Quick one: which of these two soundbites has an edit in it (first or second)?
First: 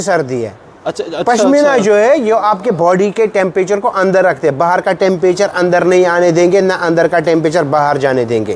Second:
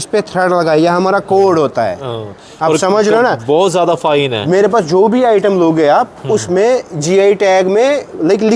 second